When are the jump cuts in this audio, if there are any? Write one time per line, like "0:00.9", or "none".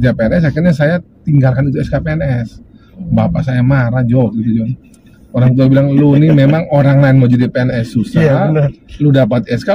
none